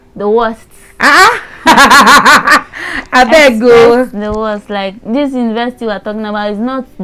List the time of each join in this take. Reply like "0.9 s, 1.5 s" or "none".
none